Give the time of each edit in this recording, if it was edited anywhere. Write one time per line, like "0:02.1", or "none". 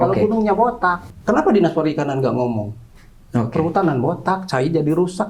0:01.1